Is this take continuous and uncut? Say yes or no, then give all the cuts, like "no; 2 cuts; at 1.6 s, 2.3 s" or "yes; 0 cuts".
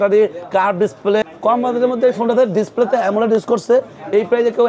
no; 1 cut; at 1.2 s